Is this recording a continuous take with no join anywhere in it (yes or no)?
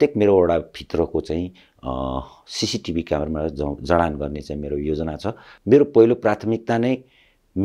no